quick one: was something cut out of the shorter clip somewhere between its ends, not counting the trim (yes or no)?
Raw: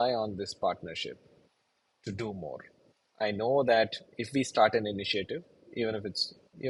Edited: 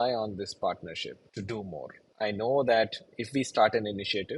yes